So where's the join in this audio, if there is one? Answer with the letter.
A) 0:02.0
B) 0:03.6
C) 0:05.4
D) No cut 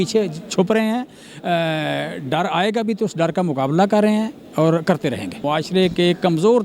C